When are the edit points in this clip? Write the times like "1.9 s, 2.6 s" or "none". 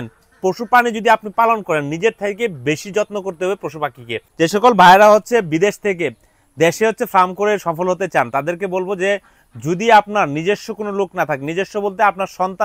4.2 s